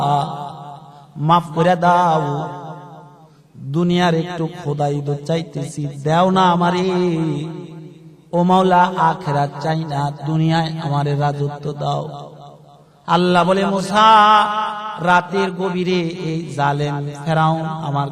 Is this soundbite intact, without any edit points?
yes; 0 cuts

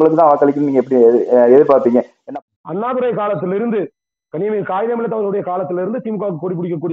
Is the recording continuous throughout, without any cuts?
no; 1 cut; at 2.2 s

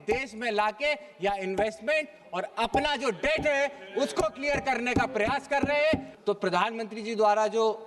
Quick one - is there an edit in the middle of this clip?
yes; 1 cut; at 6.1 s

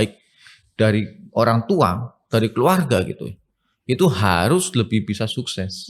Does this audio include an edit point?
no; 0 cuts

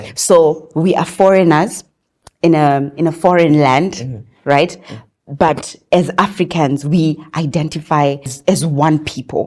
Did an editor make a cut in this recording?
yes; 1 cut; at 8.3 s

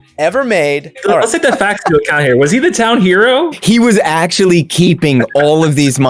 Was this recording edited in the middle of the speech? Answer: yes; 2 cuts; at 1.0 s, 3.6 s

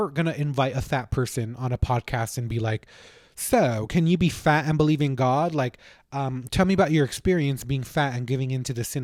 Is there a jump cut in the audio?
no; 0 cuts

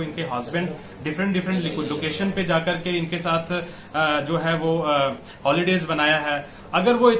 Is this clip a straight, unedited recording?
yes; 0 cuts

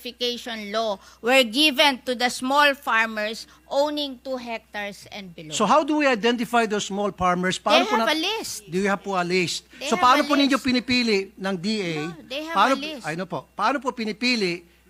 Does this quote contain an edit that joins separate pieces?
no; 0 cuts

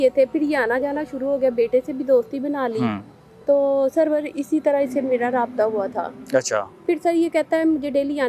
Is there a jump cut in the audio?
no; 0 cuts

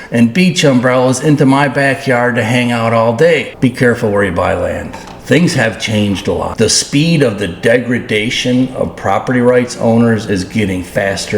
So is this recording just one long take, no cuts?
no; 2 cuts; at 3.5 s, 6.5 s

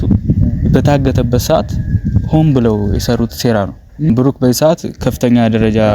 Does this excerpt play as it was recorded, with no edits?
no; 1 cut; at 4.1 s

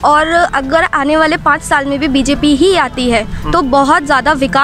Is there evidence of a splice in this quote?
no; 0 cuts

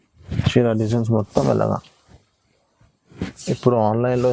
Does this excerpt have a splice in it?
no; 0 cuts

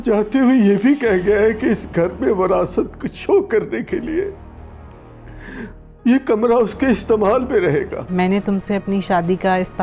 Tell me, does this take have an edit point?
yes; 1 cut; at 8.0 s

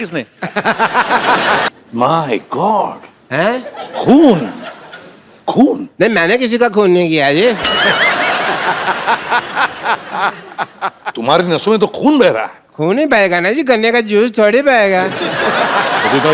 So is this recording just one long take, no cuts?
no; 1 cut; at 1.7 s

